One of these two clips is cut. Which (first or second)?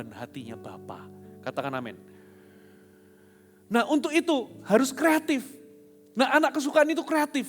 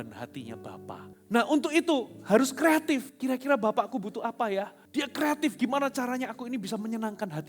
second